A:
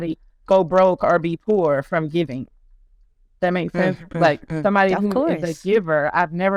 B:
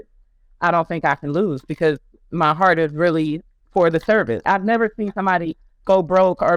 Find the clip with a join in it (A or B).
B